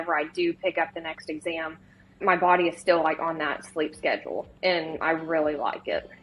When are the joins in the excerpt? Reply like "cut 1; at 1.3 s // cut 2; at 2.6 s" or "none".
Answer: cut 1; at 2.2 s